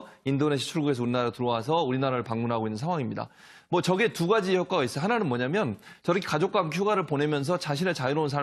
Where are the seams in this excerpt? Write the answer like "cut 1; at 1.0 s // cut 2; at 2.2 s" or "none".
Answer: cut 1; at 1.9 s